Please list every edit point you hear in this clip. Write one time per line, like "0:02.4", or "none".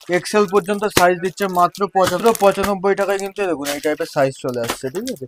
0:02.2

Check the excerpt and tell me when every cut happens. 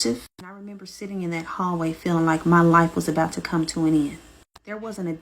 0:01.1
0:04.2

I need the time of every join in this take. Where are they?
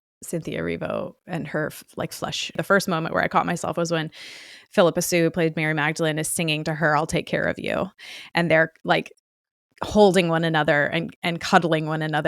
0:02.6

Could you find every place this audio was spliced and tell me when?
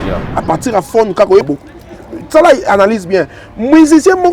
0:01.5

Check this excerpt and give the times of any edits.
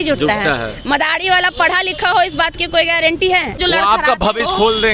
0:03.6

